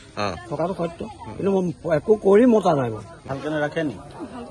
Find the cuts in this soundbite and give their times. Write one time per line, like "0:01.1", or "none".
0:03.3